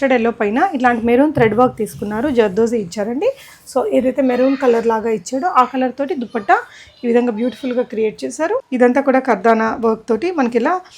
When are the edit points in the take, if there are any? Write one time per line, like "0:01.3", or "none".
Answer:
0:08.7